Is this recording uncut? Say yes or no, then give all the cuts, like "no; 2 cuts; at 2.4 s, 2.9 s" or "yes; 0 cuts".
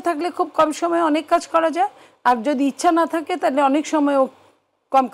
yes; 0 cuts